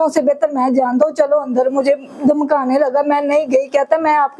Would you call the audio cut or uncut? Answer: uncut